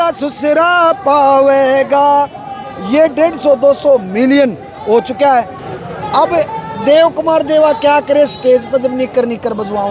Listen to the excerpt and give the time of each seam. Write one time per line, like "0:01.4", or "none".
0:05.6